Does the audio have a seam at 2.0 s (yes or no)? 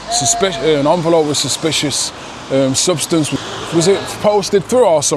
no